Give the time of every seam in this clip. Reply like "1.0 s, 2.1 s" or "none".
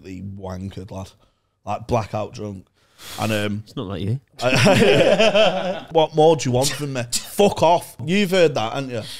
5.8 s, 8.0 s